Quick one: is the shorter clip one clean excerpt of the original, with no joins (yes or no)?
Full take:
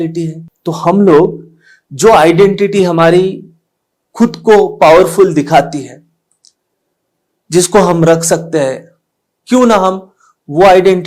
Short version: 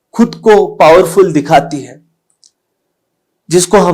yes